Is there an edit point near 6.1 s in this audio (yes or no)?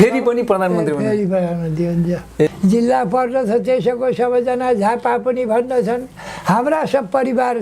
no